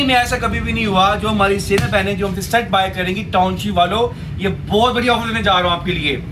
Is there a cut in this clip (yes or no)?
no